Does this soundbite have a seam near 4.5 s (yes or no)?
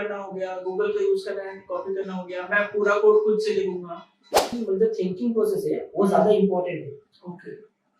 yes